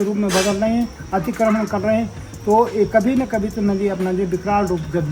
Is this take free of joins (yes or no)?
yes